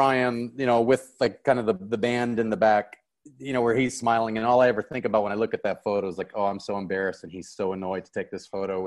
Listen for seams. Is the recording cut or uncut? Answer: uncut